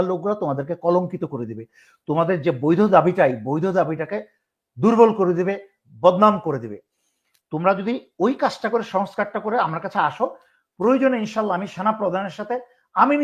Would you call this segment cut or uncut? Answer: uncut